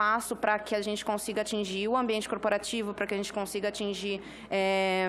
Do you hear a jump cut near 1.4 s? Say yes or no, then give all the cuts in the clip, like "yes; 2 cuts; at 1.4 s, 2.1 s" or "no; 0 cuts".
no; 0 cuts